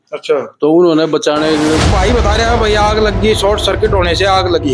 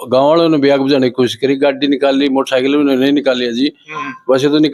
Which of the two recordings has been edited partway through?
first; 1 cut; at 1.8 s

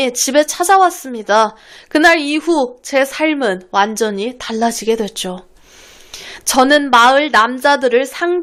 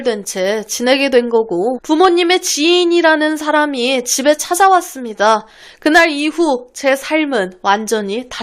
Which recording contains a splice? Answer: second; 1 cut; at 1.8 s

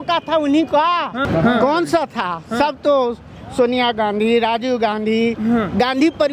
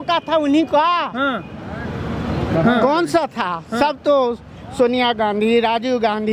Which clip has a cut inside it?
first; 1 cut; at 1.2 s

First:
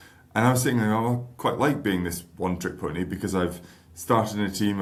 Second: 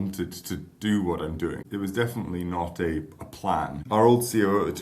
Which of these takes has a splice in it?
second; 2 cuts; at 1.6 s, 3.8 s

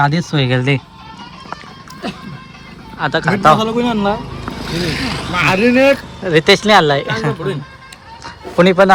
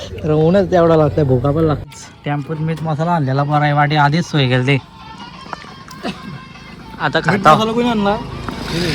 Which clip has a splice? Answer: second; 1 cut; at 1.8 s

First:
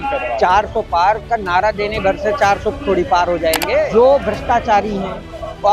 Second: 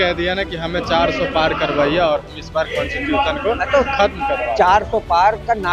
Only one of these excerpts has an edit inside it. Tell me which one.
first; 1 cut; at 3.9 s

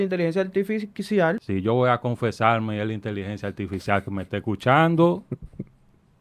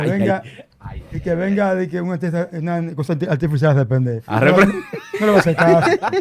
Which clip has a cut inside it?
first; 1 cut; at 1.4 s

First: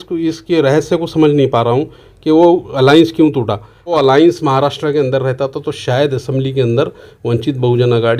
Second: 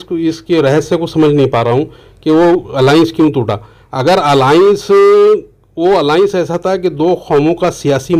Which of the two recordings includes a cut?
first; 1 cut; at 3.9 s

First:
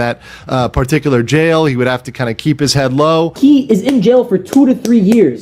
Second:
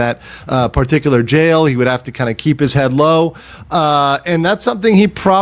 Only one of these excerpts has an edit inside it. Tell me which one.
first; 1 cut; at 3.4 s

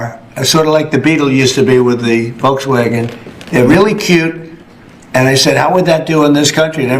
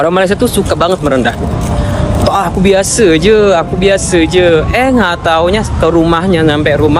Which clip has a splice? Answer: first; 1 cut; at 3.7 s

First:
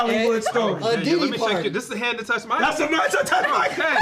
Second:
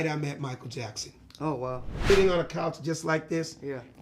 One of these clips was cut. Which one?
second; 1 cut; at 2.1 s

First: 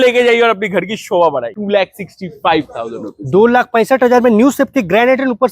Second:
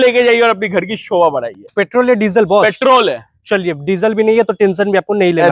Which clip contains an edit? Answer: first; 1 cut; at 1.6 s

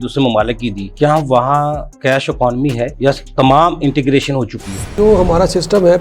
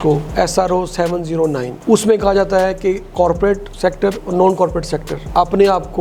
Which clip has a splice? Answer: first; 2 cuts; at 0.8 s, 4.9 s

